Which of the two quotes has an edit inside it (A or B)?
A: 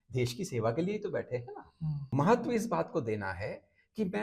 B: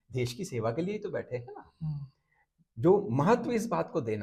A